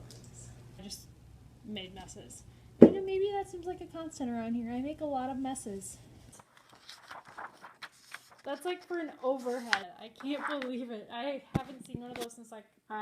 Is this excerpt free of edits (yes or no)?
no